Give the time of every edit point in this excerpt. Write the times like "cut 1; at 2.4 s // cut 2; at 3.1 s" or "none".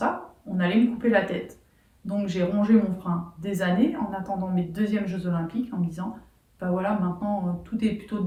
none